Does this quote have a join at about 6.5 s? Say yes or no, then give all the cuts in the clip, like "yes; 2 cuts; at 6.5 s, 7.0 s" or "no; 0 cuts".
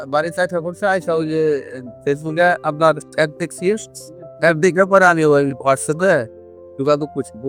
no; 0 cuts